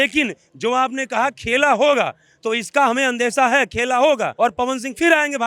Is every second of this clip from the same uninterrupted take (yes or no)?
no